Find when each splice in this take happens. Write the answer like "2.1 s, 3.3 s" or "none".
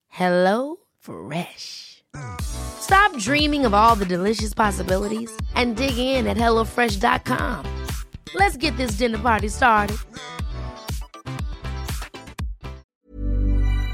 12.8 s